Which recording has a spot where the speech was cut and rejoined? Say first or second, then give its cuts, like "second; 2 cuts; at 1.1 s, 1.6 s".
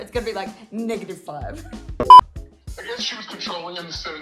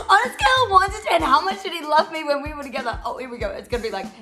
first; 2 cuts; at 1.8 s, 2.4 s